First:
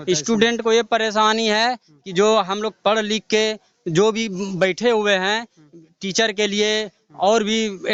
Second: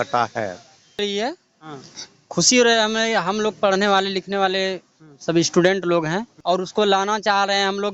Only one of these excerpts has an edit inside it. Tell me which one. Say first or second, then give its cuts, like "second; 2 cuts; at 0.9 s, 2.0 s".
second; 2 cuts; at 1.0 s, 6.3 s